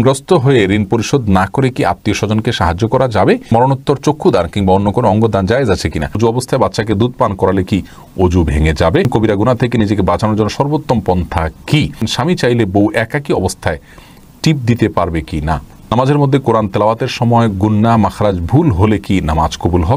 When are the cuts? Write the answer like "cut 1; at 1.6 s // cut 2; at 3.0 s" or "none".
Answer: cut 1; at 3.5 s // cut 2; at 6.2 s // cut 3; at 9.1 s // cut 4; at 12.0 s // cut 5; at 15.8 s